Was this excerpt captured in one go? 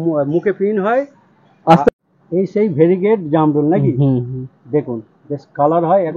no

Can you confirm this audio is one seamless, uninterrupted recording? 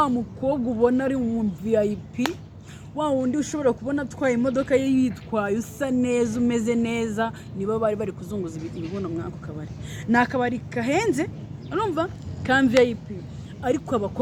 yes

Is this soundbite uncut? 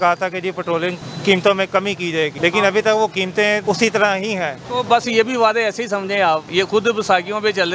no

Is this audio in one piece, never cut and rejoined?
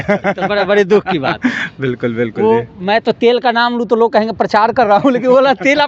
yes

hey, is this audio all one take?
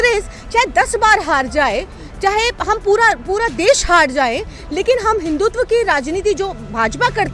yes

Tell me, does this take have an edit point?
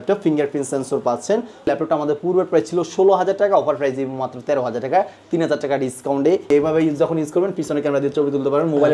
yes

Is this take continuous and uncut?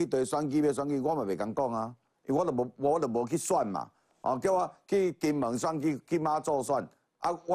yes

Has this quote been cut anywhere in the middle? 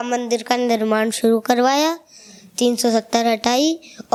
no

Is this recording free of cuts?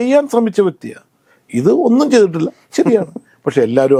yes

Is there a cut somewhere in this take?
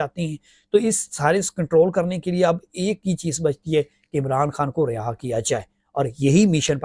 no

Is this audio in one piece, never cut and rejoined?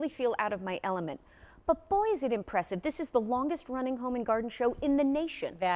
yes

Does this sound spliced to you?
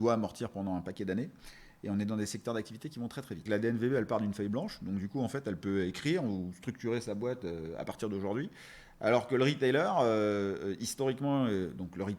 yes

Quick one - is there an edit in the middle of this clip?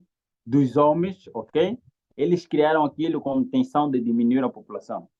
no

